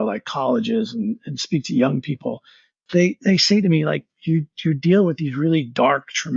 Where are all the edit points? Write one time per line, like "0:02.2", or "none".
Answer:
none